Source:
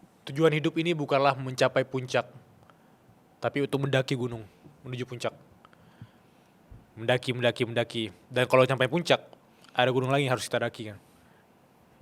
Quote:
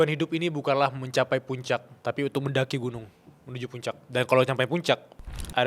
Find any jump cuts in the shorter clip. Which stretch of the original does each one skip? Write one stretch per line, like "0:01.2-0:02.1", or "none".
0:02.4-0:03.3
0:05.4-0:08.2